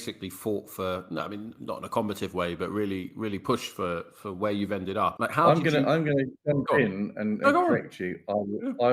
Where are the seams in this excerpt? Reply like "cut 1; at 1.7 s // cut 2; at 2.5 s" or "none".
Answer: cut 1; at 5.2 s